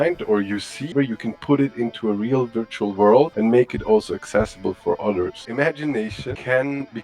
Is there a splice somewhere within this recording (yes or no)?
yes